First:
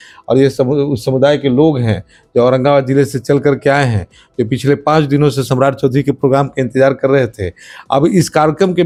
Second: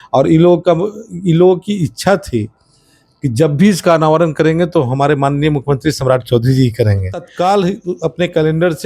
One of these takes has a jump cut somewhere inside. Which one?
second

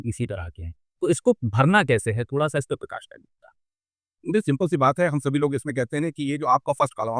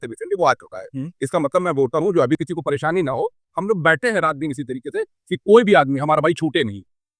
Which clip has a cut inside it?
second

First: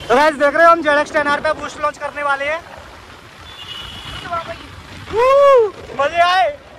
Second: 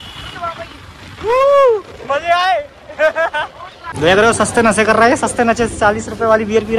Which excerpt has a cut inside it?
second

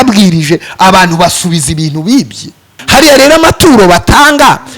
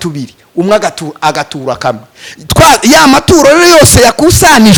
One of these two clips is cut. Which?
first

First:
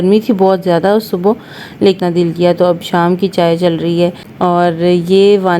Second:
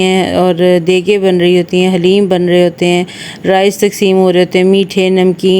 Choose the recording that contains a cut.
first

